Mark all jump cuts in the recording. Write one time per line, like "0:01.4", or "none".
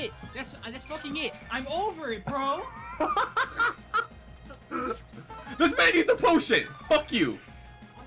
none

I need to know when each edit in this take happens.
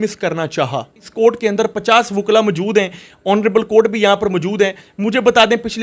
0:01.0

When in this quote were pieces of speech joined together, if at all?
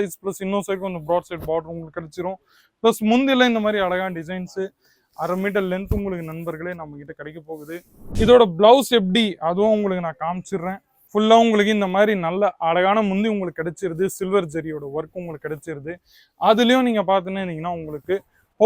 0:08.0

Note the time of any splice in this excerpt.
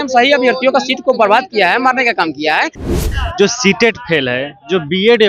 0:03.0

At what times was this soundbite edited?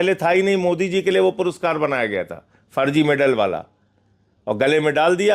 none

